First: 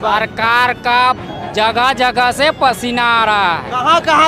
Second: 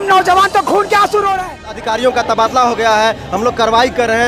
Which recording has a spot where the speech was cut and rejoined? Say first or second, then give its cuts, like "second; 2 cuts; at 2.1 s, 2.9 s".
second; 1 cut; at 1.8 s